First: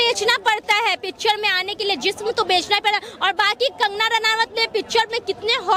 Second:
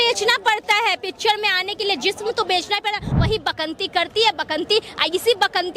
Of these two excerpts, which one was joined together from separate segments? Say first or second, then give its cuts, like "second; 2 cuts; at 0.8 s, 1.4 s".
second; 1 cut; at 3.1 s